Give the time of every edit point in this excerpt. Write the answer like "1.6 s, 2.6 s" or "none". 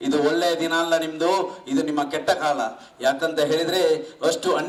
none